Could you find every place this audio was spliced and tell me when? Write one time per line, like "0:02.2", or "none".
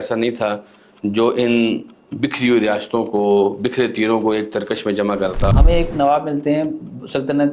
0:05.5